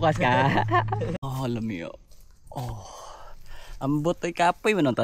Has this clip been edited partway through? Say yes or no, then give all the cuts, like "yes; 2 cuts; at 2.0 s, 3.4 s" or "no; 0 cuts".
yes; 1 cut; at 1.2 s